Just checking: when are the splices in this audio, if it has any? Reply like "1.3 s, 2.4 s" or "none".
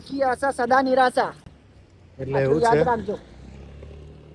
none